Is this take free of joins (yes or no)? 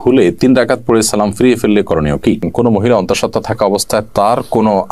no